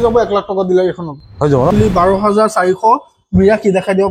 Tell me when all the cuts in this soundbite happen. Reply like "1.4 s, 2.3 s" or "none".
1.7 s